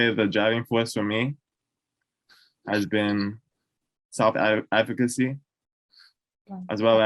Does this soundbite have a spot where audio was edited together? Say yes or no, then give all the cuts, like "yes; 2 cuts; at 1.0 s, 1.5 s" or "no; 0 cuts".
no; 0 cuts